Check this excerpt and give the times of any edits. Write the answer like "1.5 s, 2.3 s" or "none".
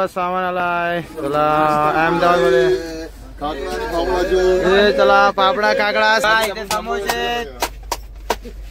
6.3 s